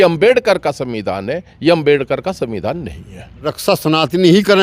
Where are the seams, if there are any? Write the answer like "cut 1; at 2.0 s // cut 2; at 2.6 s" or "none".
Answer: cut 1; at 3.5 s